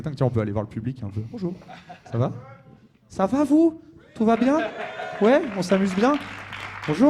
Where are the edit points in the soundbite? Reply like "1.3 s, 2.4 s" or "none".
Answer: none